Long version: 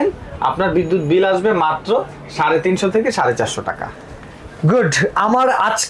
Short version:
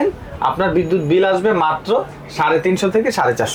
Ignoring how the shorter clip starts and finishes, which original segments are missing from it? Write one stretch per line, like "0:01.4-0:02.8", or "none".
none